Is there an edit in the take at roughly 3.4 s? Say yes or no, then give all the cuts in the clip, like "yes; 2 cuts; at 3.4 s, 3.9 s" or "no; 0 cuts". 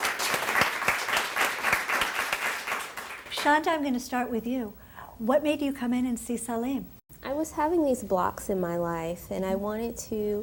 no; 0 cuts